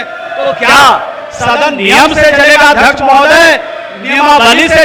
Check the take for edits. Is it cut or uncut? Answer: uncut